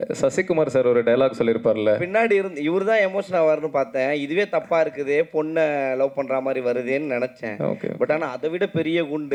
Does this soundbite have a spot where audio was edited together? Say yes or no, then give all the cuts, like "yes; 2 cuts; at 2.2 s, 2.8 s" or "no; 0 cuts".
no; 0 cuts